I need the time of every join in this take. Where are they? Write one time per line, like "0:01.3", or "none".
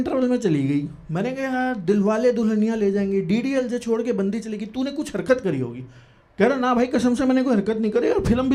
none